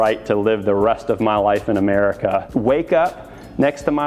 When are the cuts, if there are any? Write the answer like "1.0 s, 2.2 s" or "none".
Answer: 2.5 s